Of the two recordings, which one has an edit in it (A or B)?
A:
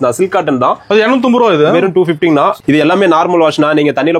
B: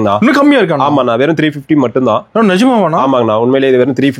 A